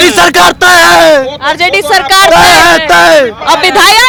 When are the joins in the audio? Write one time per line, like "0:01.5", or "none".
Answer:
none